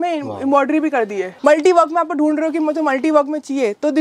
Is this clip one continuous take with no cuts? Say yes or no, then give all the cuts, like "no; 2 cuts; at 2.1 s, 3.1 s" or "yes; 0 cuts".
no; 1 cut; at 1.3 s